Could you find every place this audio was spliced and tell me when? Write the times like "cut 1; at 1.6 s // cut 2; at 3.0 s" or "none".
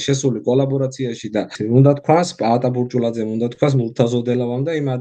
cut 1; at 1.5 s